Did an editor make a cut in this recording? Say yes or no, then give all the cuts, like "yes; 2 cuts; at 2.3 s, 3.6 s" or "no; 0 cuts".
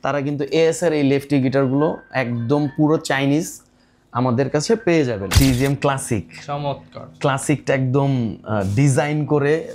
yes; 1 cut; at 5.3 s